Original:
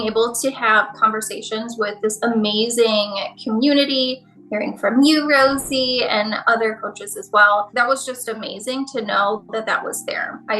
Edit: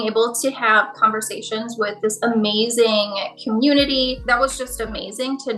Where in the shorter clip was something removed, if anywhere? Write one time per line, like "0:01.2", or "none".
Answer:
0:04.2